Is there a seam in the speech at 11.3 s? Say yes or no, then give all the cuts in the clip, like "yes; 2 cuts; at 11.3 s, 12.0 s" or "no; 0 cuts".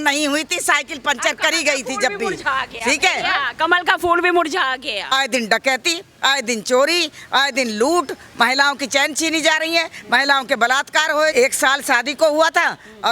yes; 2 cuts; at 5.1 s, 11.3 s